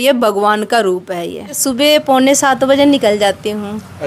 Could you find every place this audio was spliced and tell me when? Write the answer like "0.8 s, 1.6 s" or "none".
1.6 s